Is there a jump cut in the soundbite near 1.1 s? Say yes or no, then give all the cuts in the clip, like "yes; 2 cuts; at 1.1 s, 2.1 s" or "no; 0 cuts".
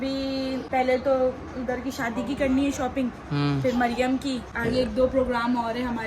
no; 1 cut; at 4.5 s